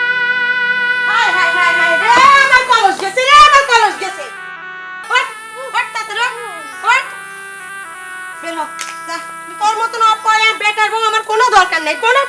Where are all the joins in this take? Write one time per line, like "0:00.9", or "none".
0:00.9
0:04.9

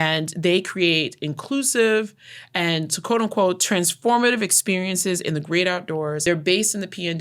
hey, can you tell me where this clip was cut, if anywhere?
0:06.2

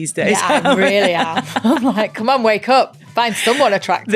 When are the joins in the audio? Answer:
0:03.0

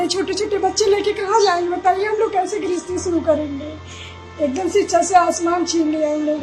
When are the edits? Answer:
none

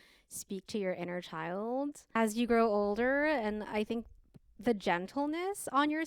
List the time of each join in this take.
0:02.2

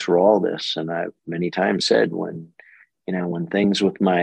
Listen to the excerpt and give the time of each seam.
none

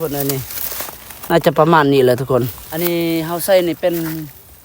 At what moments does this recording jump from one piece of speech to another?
0:02.6

